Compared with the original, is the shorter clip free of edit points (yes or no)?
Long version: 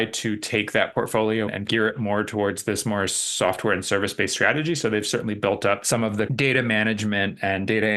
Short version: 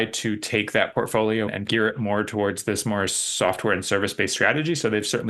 yes